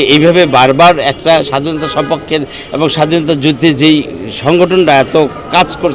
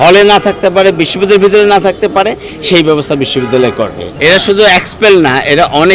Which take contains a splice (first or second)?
second